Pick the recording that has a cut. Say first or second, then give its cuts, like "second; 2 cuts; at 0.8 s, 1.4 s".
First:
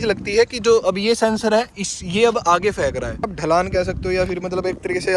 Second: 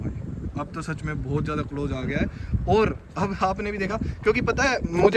first; 1 cut; at 3.4 s